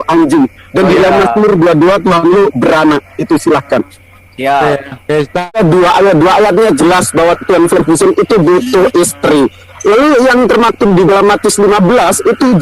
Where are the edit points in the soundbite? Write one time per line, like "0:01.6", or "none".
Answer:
0:05.5